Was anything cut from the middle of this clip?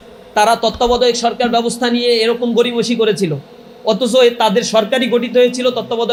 no; 0 cuts

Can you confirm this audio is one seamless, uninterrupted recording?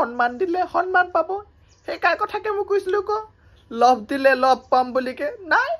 yes; 0 cuts

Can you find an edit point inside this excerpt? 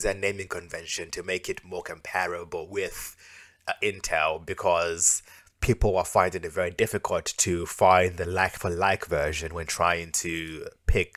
no; 0 cuts

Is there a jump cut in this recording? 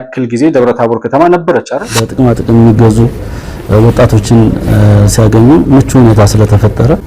yes; 1 cut; at 2.0 s

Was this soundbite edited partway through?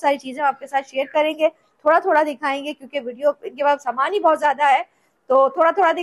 no; 0 cuts

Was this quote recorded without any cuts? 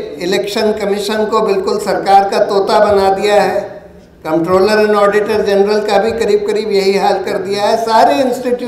yes; 0 cuts

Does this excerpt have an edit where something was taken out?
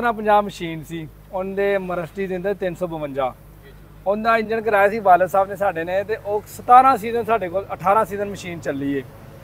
no; 0 cuts

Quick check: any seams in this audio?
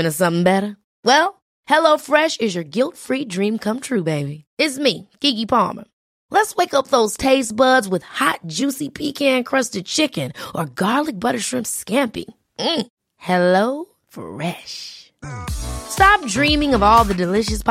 no; 0 cuts

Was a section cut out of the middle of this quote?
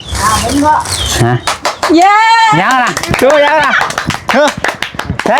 no; 0 cuts

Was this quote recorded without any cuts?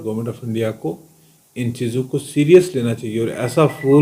yes; 0 cuts

